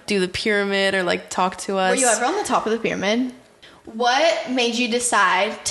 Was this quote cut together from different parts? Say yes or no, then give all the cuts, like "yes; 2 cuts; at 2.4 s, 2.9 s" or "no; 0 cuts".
yes; 1 cut; at 3.6 s